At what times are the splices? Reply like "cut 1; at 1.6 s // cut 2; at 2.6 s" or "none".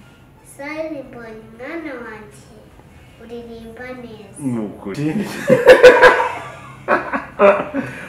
cut 1; at 5.0 s